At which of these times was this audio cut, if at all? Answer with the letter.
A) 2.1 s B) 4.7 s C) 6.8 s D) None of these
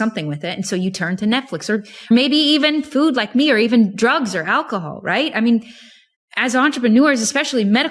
A